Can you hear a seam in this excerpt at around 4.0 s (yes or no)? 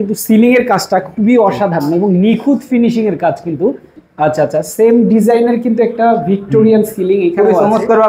yes